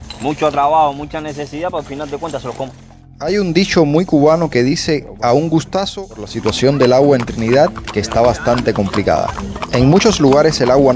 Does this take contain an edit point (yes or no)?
yes